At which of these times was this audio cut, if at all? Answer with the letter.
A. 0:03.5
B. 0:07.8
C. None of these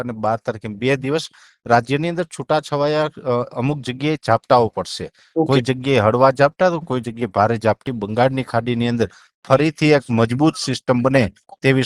B